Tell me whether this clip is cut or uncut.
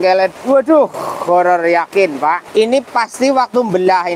cut